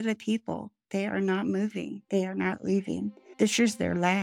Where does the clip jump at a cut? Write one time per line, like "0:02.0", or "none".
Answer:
0:02.0
0:03.2